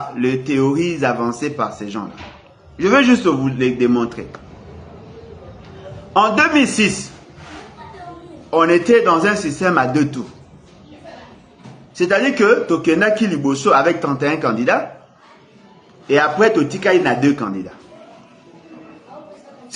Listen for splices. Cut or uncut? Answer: uncut